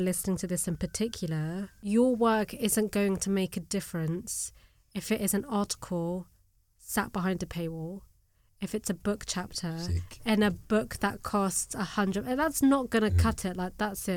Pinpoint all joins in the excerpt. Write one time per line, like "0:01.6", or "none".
0:01.7